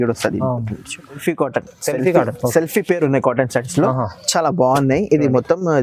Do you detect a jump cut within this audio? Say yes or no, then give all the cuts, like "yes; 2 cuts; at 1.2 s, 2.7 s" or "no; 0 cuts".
yes; 1 cut; at 1.2 s